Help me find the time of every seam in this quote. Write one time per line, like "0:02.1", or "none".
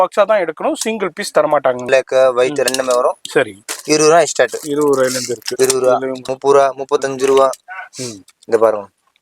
0:01.9
0:06.3